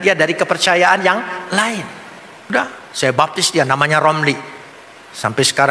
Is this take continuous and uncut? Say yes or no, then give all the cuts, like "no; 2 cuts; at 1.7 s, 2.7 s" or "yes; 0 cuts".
no; 1 cut; at 2.5 s